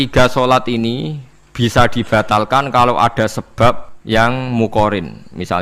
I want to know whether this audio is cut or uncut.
cut